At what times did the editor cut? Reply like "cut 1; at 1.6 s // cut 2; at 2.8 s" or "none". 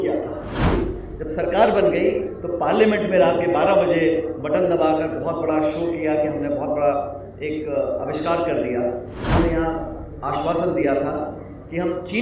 cut 1; at 0.7 s // cut 2; at 9.3 s

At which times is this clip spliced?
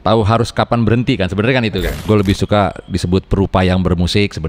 cut 1; at 2.0 s

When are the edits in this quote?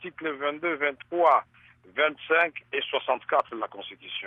cut 1; at 1.3 s

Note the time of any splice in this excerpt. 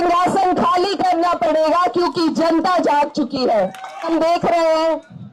cut 1; at 4.1 s

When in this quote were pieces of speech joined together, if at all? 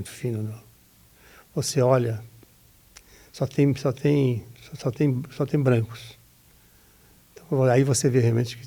none

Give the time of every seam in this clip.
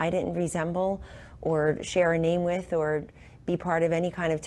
none

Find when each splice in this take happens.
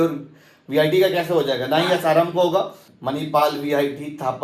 cut 1; at 2.8 s

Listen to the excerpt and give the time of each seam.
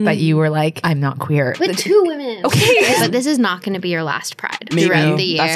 cut 1; at 1.6 s // cut 2; at 3.0 s // cut 3; at 4.7 s

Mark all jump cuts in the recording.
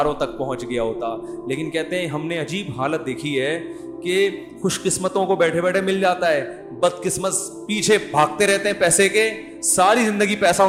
none

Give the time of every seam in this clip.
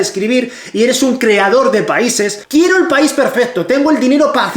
cut 1; at 2.4 s

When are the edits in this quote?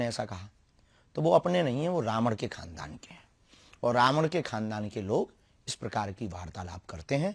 none

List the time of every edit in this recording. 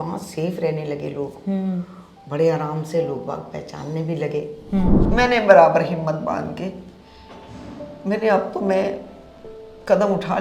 cut 1; at 5.0 s

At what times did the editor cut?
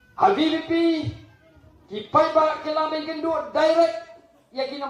none

